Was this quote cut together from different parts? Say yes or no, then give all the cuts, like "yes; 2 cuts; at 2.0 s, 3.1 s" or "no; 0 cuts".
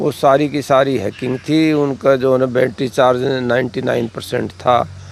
no; 0 cuts